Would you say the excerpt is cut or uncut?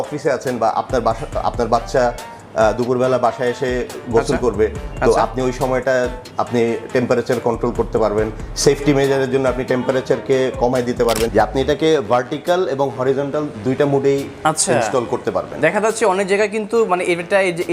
cut